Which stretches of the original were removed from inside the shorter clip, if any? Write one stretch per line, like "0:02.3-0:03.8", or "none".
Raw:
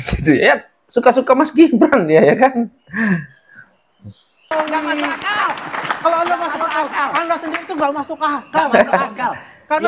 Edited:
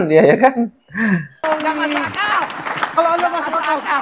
0:03.3-0:04.4